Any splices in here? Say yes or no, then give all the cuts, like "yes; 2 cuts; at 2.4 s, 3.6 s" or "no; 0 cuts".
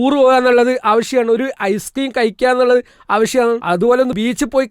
yes; 1 cut; at 3.6 s